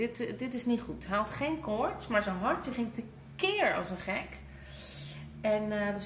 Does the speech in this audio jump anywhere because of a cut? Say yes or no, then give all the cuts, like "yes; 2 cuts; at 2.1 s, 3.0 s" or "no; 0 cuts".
no; 0 cuts